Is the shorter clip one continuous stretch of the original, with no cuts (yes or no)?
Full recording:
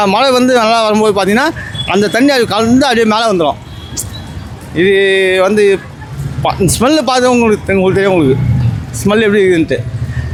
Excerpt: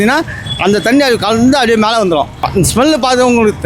no